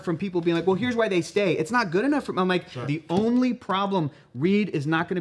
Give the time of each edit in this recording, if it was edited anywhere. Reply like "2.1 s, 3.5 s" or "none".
2.9 s